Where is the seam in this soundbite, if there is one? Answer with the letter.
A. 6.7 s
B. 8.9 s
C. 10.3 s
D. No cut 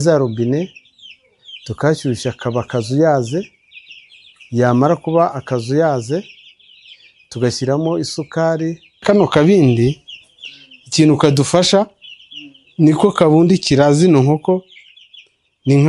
B